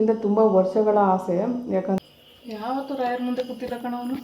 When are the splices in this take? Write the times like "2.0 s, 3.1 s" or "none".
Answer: 2.0 s